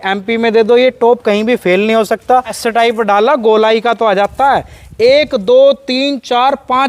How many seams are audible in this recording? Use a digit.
1